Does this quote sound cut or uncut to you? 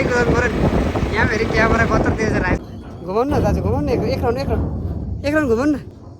cut